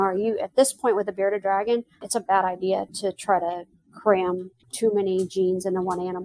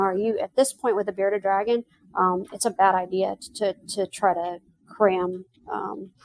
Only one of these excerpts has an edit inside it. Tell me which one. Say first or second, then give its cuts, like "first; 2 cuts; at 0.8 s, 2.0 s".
first; 3 cuts; at 2.0 s, 2.9 s, 4.6 s